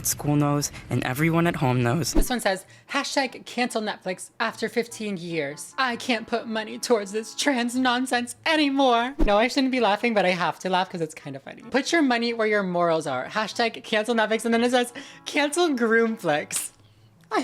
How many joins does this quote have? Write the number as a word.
three